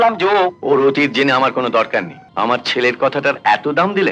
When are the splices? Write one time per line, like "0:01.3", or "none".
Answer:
0:02.2